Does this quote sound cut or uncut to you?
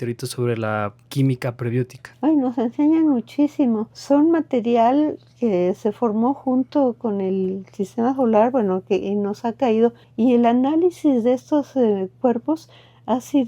cut